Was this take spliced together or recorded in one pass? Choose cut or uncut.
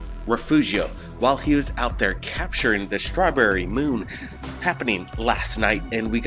cut